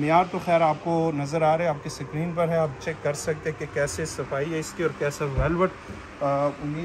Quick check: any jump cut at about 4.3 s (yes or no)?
no